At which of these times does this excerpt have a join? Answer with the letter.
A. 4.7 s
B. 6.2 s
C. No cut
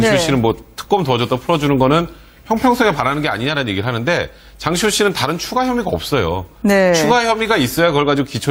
A